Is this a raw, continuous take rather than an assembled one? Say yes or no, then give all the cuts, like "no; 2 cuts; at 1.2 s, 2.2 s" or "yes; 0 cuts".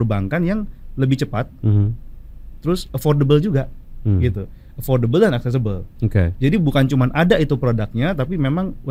yes; 0 cuts